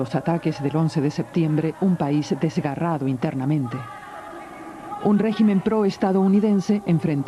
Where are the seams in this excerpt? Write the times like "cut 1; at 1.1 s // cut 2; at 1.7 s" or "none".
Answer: none